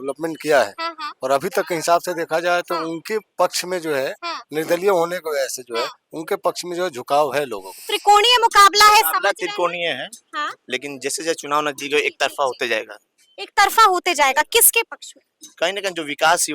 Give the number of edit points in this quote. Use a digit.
1